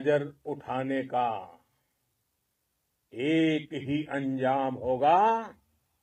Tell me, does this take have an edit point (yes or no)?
no